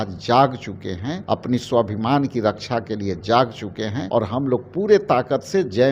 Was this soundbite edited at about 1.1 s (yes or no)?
yes